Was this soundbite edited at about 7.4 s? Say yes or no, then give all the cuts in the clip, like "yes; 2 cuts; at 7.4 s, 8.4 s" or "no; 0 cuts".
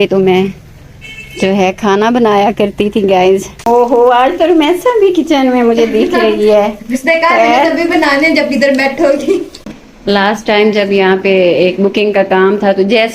no; 2 cuts; at 3.5 s, 9.6 s